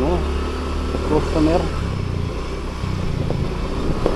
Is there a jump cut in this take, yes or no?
no